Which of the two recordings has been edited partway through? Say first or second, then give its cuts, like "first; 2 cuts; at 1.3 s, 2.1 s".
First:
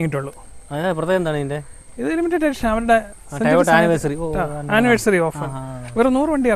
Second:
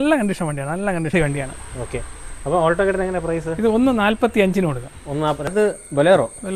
second; 2 cuts; at 1.1 s, 5.5 s